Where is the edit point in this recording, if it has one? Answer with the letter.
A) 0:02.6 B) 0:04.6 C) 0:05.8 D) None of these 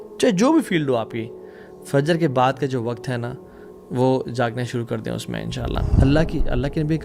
C